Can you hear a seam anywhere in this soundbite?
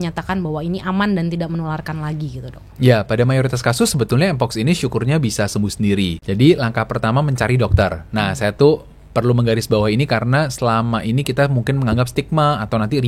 yes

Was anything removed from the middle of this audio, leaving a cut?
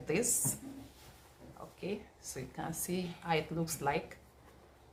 no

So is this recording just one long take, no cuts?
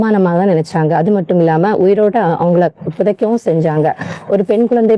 yes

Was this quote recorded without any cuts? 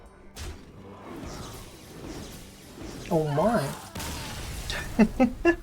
yes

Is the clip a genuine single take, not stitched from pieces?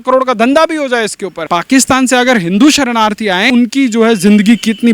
no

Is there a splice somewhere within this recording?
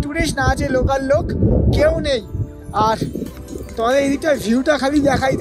no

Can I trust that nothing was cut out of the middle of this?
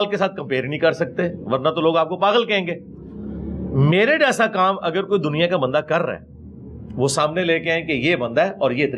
yes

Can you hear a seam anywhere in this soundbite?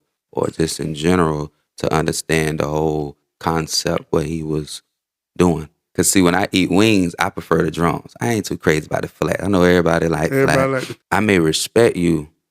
yes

